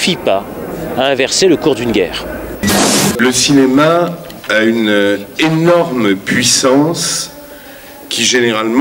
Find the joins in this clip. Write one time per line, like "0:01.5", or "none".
0:02.9